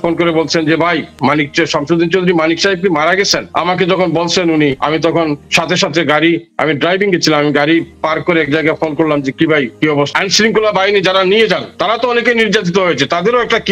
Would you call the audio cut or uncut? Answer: cut